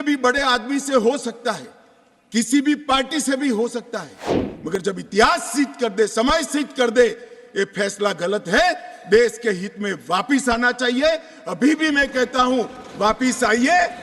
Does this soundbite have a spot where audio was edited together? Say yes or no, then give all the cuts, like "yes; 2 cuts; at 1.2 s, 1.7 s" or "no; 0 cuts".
no; 0 cuts